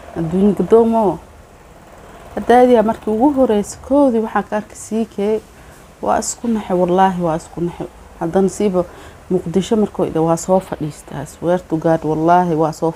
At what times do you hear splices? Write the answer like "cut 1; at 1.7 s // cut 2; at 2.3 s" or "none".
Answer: none